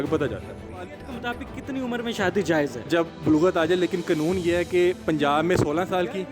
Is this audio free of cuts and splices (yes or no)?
no